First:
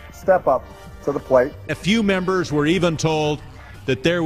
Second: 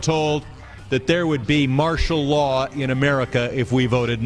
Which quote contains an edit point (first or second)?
first